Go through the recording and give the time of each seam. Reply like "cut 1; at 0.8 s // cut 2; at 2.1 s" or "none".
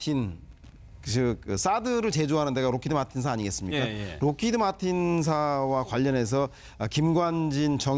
cut 1; at 5.0 s